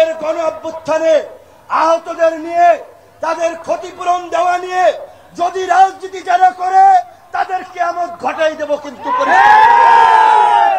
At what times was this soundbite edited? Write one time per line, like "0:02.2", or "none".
none